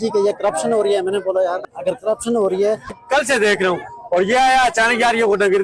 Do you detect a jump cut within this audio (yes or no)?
yes